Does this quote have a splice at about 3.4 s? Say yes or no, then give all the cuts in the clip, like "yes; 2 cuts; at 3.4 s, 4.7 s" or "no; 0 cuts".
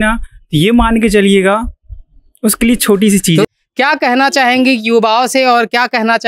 yes; 1 cut; at 3.4 s